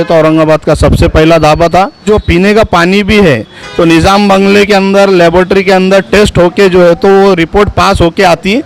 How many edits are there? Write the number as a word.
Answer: one